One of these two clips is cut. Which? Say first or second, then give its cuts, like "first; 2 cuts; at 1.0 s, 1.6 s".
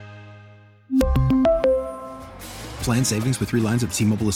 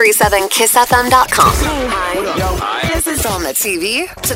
second; 1 cut; at 1.6 s